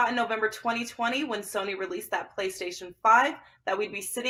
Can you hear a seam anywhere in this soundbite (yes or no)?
no